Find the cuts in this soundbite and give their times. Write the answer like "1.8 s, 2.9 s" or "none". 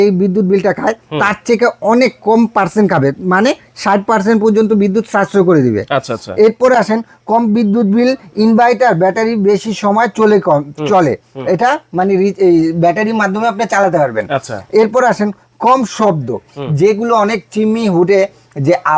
none